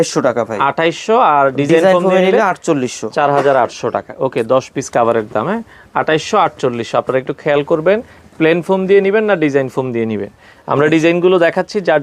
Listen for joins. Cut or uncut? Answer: uncut